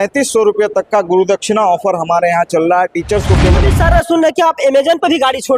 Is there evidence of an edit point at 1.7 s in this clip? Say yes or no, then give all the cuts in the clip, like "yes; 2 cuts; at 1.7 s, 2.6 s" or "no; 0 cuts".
no; 1 cut; at 3.6 s